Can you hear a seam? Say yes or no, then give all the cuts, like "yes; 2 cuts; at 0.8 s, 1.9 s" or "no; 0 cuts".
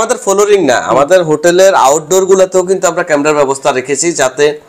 no; 0 cuts